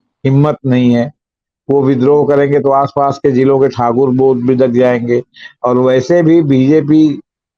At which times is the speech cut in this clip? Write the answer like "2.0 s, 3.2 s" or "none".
none